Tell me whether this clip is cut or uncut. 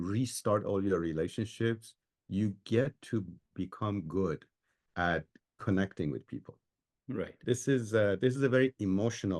cut